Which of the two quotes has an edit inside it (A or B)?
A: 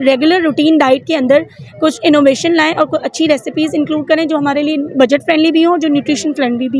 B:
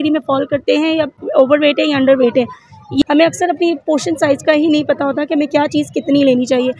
B